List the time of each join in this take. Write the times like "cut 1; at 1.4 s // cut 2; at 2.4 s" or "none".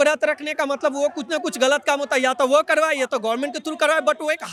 none